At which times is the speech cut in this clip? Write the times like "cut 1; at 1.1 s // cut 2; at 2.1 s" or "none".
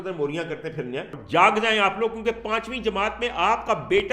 cut 1; at 1.2 s